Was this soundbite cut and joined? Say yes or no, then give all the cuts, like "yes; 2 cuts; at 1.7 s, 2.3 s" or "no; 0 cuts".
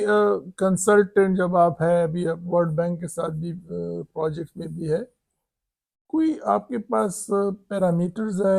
no; 0 cuts